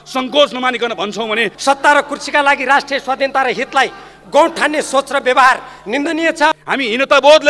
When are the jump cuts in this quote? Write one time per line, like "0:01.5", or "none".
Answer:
0:01.5
0:06.5